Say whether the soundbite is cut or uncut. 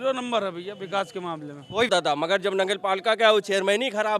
cut